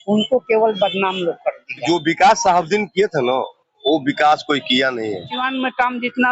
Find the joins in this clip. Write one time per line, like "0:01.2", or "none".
0:01.8
0:05.3